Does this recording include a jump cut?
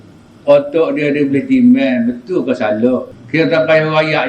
yes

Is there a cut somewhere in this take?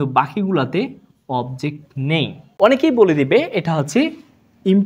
yes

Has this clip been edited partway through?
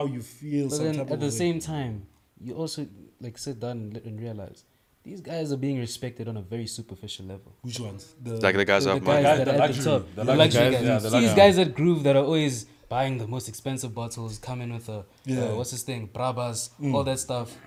no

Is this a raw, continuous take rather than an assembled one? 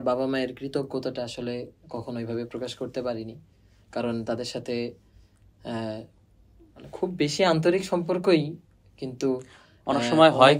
yes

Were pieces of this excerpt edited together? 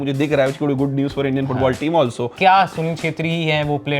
yes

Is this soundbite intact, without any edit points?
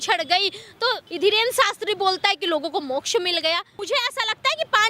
no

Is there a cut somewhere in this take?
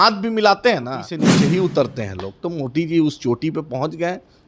yes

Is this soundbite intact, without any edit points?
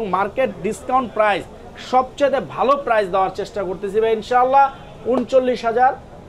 yes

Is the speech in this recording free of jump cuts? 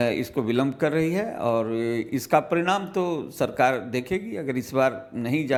yes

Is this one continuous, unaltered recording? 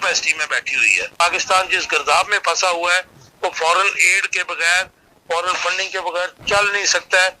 no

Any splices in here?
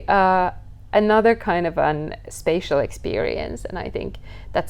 no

